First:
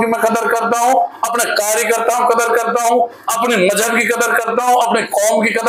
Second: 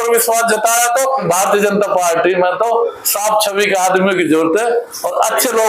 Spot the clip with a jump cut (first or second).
second